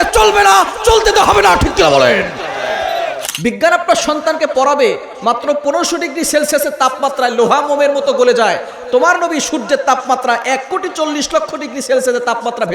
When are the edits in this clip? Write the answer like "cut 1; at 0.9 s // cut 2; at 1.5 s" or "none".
cut 1; at 3.2 s